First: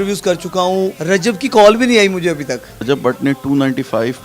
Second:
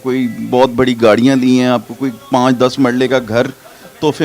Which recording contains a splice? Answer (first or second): first